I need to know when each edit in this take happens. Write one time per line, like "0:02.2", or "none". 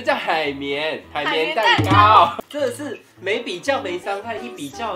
0:02.4

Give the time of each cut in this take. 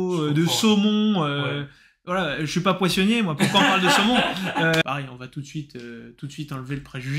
0:04.8

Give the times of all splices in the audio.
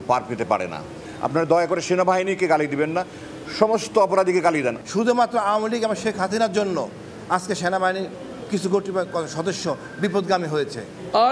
none

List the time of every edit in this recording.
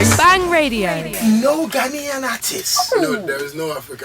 0:01.1

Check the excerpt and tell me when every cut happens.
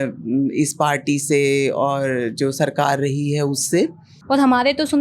0:04.1

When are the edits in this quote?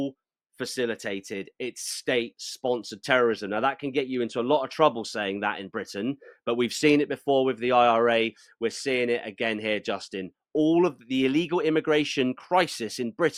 none

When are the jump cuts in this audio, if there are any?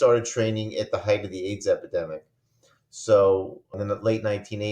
0:03.8

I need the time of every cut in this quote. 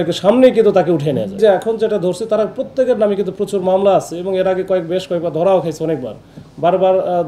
0:01.4

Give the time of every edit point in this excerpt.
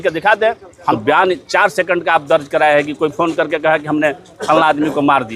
0:01.0

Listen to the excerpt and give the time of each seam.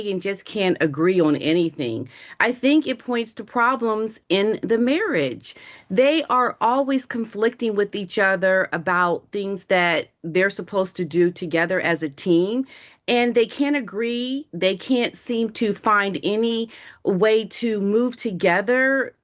none

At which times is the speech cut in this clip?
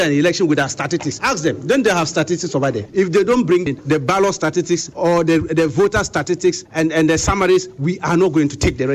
0:01.2
0:02.8
0:03.6
0:04.9
0:06.7

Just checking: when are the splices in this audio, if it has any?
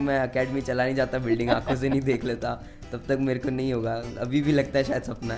none

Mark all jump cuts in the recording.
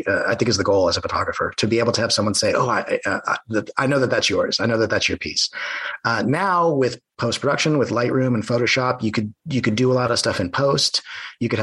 none

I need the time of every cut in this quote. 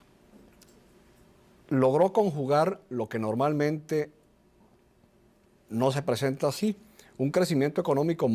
0:01.6

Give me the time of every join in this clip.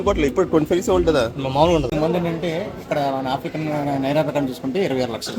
0:01.9

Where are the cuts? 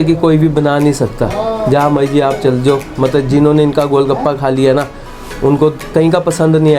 0:05.8

